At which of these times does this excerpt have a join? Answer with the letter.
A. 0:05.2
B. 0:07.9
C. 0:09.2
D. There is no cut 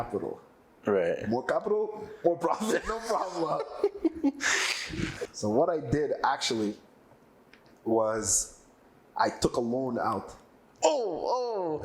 A